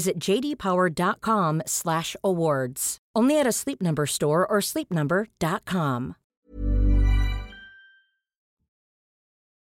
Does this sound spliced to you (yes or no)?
no